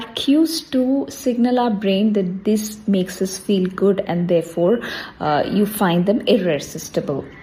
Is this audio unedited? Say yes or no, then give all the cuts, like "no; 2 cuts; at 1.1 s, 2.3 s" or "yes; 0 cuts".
yes; 0 cuts